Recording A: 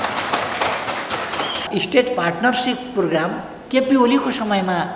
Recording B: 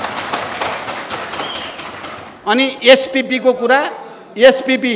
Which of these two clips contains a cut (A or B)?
A